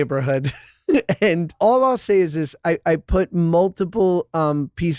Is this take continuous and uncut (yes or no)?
no